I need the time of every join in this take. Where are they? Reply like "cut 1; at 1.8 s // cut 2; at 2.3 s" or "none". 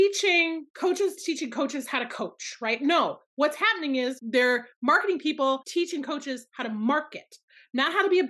none